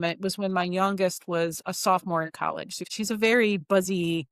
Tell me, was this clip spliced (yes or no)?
yes